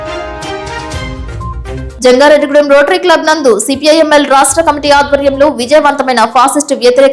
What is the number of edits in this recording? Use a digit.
1